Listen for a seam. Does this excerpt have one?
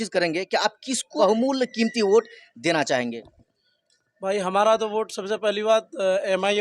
yes; 1 cut; at 1.1 s

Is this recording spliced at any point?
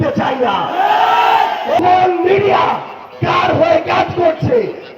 yes; 1 cut; at 1.8 s

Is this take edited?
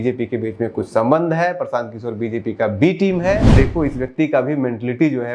yes; 1 cut; at 3.5 s

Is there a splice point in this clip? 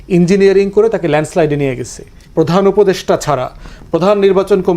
yes; 1 cut; at 2.1 s

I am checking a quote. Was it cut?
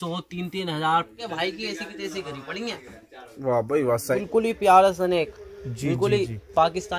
yes; 2 cuts; at 1.2 s, 4.1 s

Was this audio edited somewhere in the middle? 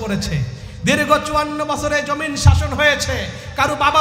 no; 0 cuts

